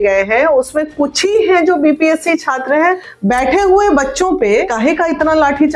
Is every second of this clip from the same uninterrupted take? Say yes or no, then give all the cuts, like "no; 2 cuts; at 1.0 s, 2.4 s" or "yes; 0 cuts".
no; 2 cuts; at 3.1 s, 4.7 s